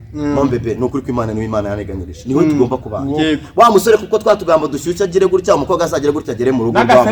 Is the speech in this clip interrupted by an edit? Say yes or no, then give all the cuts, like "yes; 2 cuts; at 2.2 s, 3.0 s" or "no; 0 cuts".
no; 0 cuts